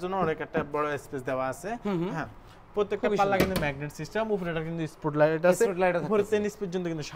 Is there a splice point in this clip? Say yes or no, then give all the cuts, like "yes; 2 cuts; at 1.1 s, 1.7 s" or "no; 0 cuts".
no; 0 cuts